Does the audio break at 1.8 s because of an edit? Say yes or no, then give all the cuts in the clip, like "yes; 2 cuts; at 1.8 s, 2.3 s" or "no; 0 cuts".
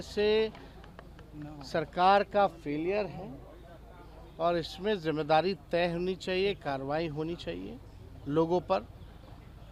no; 0 cuts